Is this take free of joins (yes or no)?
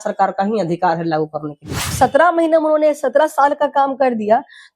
no